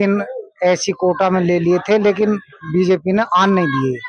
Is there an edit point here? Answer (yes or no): no